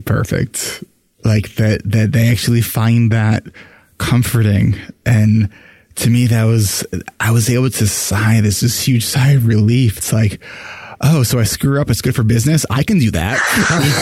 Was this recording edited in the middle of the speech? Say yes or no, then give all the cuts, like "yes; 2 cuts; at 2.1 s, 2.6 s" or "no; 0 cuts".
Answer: no; 0 cuts